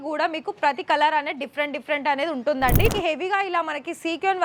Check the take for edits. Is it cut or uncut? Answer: cut